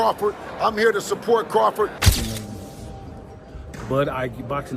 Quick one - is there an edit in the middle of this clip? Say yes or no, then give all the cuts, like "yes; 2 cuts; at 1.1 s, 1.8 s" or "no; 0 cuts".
yes; 1 cut; at 2.0 s